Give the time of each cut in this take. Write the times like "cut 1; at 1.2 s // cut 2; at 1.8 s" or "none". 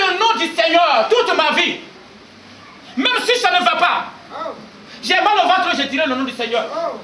none